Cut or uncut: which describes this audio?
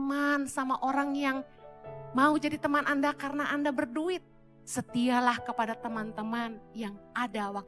uncut